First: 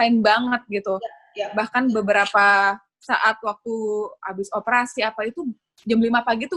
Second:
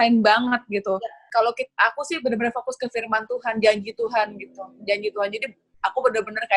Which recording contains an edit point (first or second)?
second